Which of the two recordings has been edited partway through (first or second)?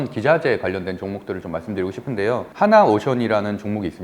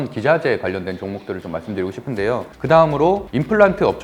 second